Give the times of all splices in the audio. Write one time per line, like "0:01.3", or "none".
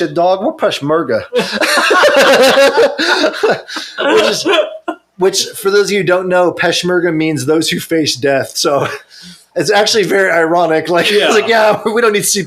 none

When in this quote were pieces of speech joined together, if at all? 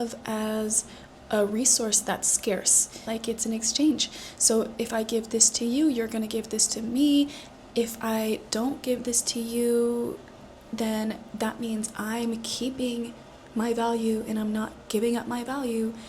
0:03.0

